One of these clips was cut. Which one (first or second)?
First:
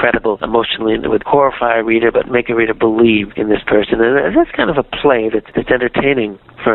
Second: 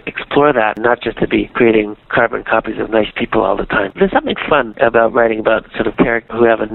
second